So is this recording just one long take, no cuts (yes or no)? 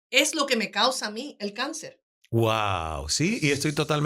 yes